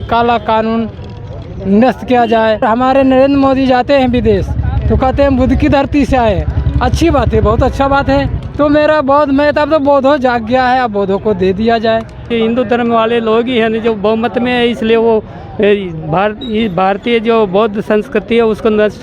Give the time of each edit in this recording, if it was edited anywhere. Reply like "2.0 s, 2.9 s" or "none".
2.6 s, 8.4 s, 12.3 s